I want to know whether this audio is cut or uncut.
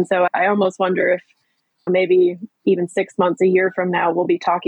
uncut